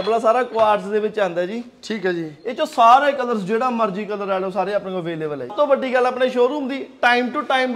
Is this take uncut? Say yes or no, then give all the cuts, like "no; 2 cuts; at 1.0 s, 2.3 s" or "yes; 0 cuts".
no; 1 cut; at 5.5 s